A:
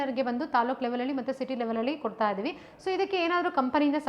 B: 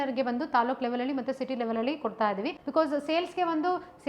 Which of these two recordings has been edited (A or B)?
B